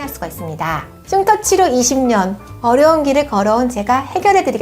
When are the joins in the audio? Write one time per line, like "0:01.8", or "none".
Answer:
0:01.0